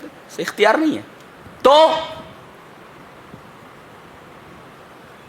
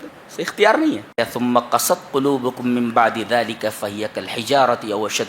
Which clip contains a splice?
second; 1 cut; at 1.2 s

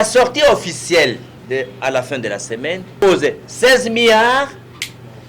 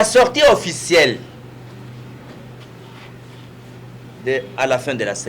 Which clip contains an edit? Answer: first; 2 cuts; at 1.3 s, 3.0 s

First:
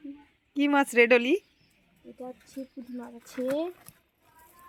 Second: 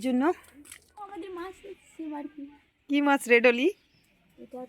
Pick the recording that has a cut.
second; 1 cut; at 1.2 s

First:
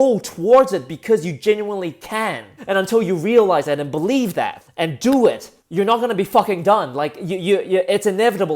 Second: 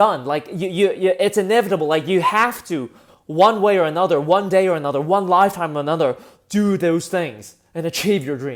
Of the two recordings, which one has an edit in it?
first; 3 cuts; at 2.5 s, 4.6 s, 5.5 s

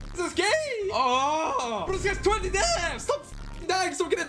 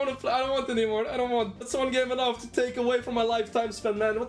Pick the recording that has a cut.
first; 1 cut; at 0.9 s

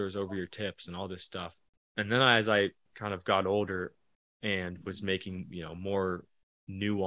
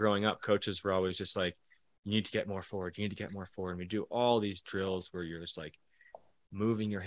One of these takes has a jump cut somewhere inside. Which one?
first; 2 cuts; at 1.6 s, 2.9 s

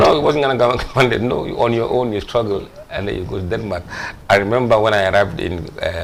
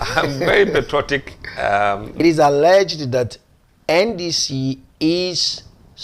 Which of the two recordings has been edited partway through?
second; 1 cut; at 2.2 s

